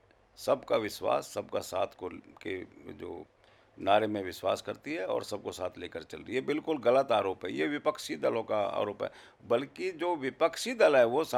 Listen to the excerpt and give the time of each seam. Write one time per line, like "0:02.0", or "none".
none